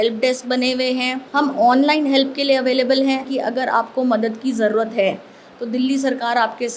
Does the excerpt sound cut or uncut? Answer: cut